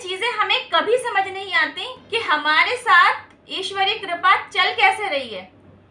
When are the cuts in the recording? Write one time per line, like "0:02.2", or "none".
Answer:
0:01.9

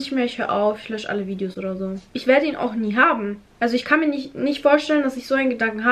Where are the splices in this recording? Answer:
none

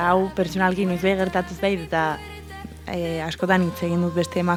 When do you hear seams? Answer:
none

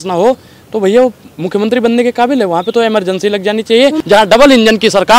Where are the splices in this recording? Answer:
0:04.0

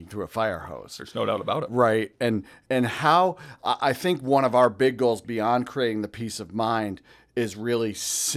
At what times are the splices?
none

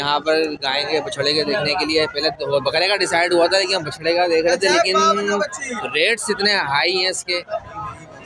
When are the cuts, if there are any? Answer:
none

